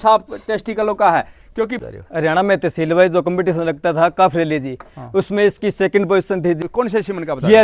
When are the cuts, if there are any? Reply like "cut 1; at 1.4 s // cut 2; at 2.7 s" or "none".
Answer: cut 1; at 1.9 s // cut 2; at 6.6 s